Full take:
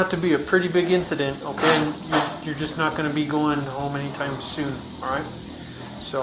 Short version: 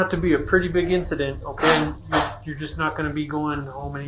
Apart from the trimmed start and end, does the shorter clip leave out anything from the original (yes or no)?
no